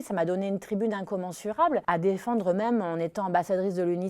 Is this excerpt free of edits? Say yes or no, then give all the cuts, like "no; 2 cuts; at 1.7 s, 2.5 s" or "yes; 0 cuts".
no; 1 cut; at 1.8 s